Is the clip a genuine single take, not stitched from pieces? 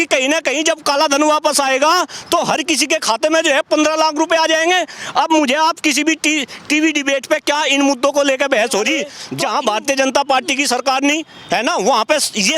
no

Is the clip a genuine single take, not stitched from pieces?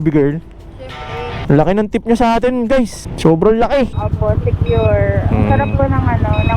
no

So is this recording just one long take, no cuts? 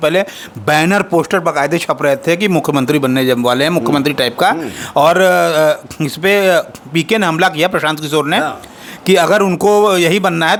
yes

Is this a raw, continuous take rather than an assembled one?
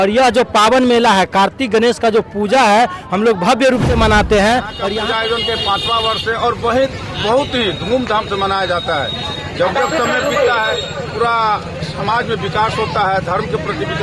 no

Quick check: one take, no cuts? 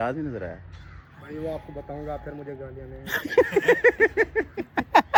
yes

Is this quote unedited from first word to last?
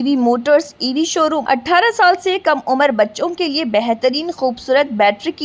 no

